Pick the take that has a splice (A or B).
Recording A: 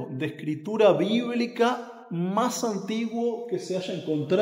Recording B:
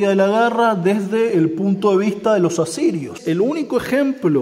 B